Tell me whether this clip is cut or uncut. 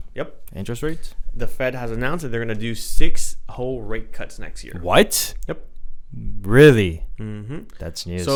uncut